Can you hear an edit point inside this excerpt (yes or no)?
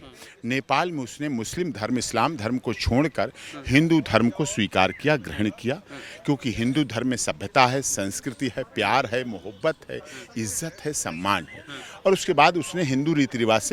no